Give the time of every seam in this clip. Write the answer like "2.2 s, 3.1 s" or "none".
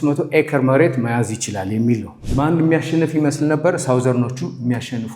2.2 s